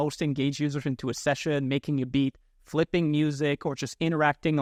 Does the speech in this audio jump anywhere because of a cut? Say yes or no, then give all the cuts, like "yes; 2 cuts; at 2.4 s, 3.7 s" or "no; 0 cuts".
no; 0 cuts